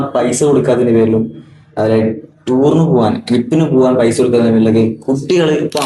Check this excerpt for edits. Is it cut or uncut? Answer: uncut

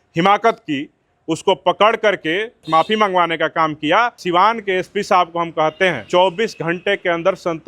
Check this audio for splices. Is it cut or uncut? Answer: cut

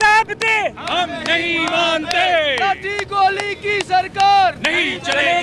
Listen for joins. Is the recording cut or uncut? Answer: uncut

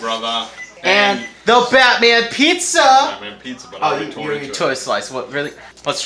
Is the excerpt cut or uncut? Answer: uncut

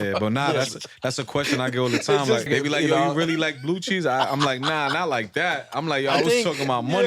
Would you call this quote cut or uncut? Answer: cut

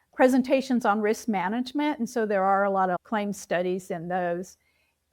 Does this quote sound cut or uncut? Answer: uncut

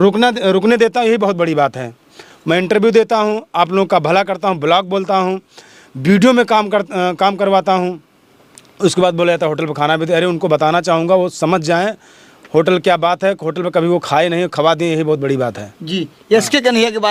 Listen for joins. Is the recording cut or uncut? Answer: uncut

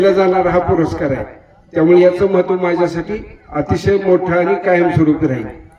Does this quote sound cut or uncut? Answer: uncut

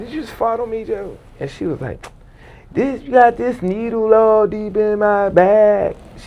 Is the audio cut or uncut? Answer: uncut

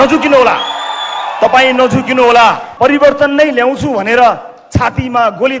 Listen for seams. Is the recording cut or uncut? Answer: cut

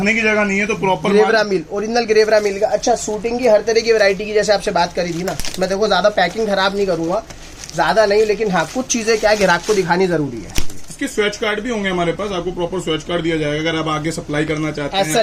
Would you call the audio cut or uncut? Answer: uncut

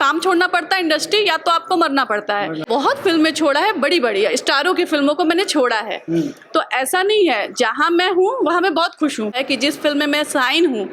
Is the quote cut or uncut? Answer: cut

